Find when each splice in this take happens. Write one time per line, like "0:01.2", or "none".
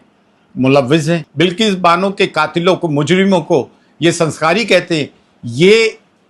0:01.3